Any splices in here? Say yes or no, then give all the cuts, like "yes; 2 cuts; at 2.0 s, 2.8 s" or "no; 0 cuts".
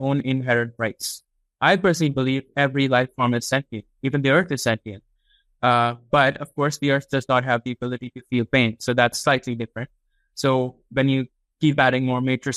no; 0 cuts